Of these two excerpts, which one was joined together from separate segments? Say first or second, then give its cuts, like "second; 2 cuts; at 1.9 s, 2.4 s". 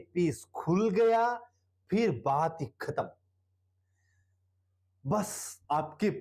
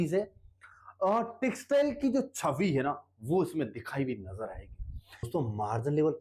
second; 1 cut; at 5.3 s